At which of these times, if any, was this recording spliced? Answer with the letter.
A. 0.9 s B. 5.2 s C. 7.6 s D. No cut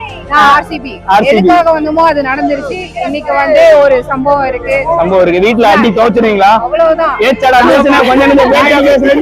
D